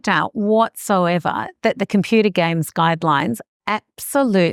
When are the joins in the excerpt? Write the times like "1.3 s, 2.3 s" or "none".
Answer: none

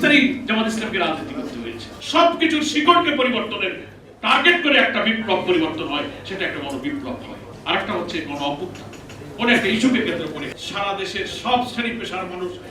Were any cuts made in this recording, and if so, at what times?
1.9 s, 7.4 s, 10.4 s

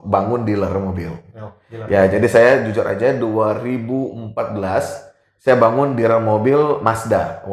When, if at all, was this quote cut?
none

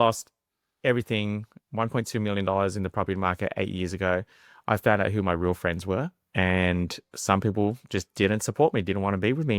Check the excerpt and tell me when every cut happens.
6.2 s

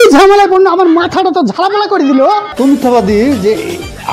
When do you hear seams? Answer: 2.5 s

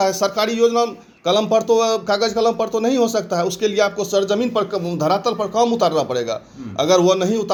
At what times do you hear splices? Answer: none

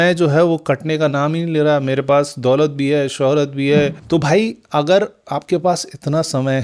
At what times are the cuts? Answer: 4.0 s

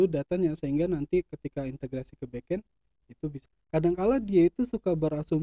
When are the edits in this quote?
3.5 s

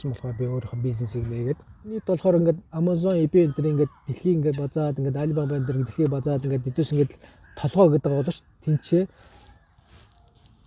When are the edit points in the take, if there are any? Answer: 2.0 s

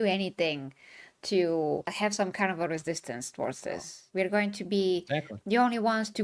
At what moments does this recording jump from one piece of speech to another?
3.9 s

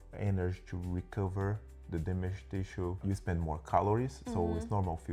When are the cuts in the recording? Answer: none

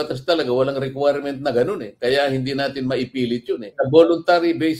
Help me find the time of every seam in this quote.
3.7 s

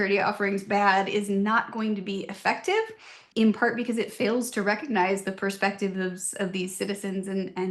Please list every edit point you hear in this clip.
3.3 s

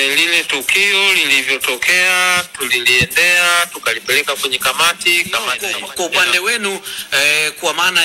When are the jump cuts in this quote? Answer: 5.6 s

